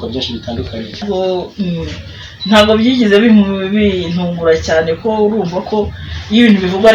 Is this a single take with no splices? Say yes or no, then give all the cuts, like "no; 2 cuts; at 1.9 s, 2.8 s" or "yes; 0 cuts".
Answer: no; 1 cut; at 1.0 s